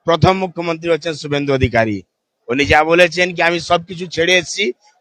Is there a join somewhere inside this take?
no; 0 cuts

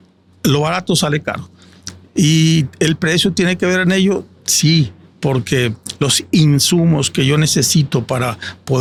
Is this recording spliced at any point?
no; 0 cuts

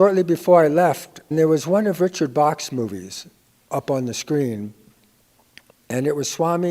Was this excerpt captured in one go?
no; 1 cut; at 1.3 s

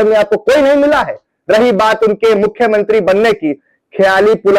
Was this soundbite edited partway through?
no; 0 cuts

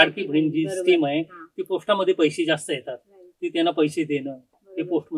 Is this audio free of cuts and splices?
yes; 0 cuts

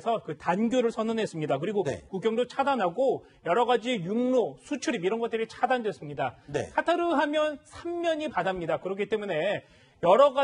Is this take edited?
yes; 1 cut; at 4.0 s

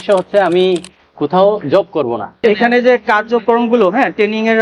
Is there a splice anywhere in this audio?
yes; 1 cut; at 2.3 s

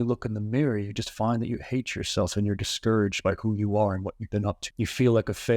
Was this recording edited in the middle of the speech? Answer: yes; 1 cut; at 4.7 s

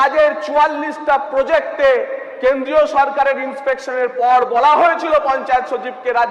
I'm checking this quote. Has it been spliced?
no; 0 cuts

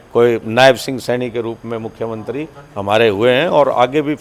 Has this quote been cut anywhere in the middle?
no; 0 cuts

